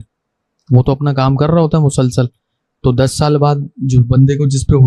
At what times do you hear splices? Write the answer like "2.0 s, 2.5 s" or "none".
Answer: none